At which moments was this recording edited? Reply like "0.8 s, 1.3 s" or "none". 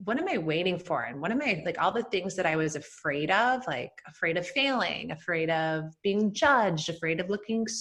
none